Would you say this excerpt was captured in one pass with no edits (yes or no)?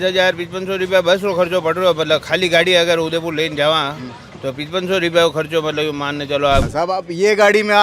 no